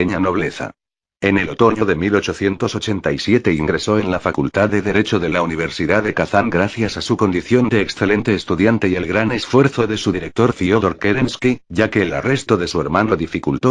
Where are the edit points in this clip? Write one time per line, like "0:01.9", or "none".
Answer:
0:09.0